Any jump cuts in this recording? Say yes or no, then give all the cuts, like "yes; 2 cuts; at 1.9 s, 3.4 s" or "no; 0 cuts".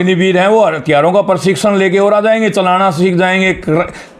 no; 0 cuts